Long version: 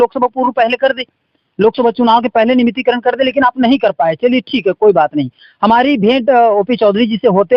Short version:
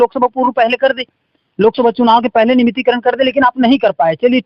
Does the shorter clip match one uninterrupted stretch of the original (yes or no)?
yes